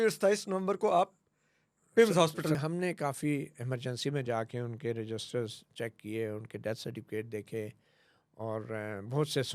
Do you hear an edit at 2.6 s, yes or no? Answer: yes